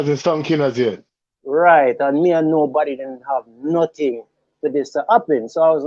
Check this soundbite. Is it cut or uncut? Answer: uncut